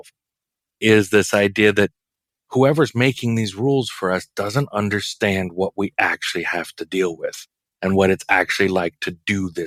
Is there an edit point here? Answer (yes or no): no